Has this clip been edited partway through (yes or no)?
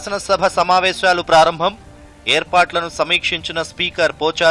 no